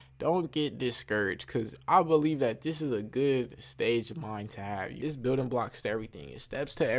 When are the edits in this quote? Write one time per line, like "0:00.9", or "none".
0:05.0

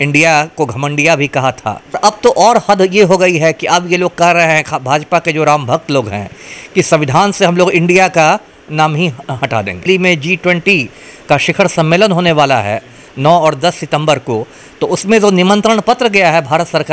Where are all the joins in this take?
0:02.0
0:09.8

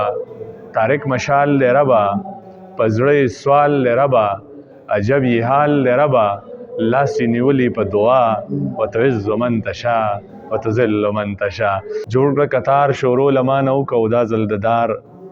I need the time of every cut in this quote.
0:12.0

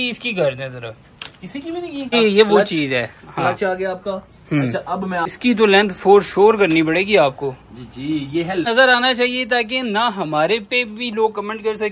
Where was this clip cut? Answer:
0:02.1
0:05.3
0:08.7

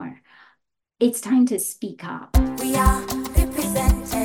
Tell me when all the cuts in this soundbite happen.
0:02.2

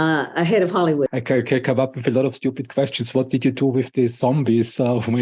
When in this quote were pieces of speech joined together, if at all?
0:01.1

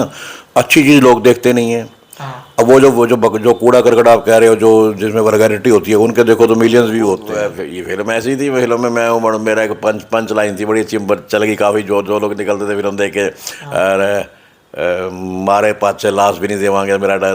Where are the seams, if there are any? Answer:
0:07.3

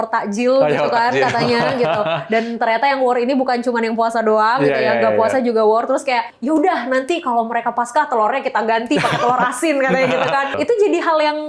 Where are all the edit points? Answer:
0:06.3
0:10.5

